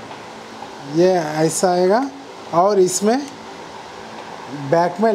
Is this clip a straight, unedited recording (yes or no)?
yes